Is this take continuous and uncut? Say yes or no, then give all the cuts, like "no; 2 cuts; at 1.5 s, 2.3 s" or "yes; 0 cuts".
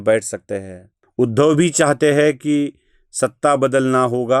no; 1 cut; at 1.0 s